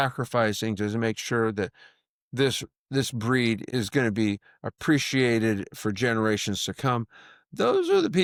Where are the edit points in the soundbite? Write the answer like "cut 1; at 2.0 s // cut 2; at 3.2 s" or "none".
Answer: none

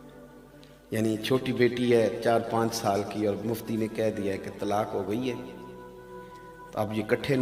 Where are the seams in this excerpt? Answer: none

